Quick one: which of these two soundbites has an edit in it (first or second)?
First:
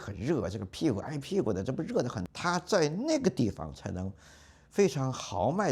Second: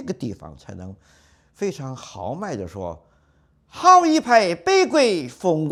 first